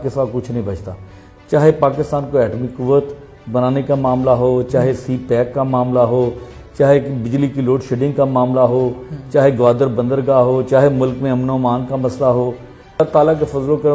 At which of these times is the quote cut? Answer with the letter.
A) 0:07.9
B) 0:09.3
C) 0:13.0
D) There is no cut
C